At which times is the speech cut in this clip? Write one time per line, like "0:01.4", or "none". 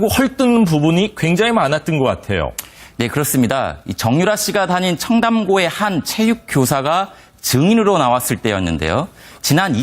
0:05.3